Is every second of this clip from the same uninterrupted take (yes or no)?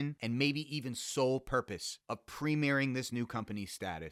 yes